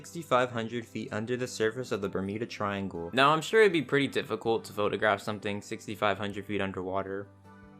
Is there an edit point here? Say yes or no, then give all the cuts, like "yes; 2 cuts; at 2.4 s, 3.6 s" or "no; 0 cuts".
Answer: yes; 1 cut; at 3.0 s